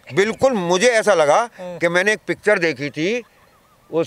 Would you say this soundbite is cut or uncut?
uncut